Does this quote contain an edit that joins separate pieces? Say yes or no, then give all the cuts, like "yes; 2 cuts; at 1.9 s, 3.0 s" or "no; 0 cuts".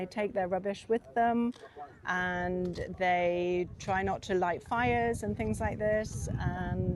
no; 0 cuts